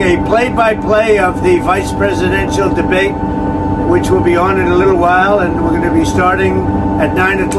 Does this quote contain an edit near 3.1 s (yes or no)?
no